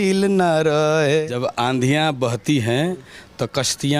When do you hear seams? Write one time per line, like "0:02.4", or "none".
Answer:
0:01.3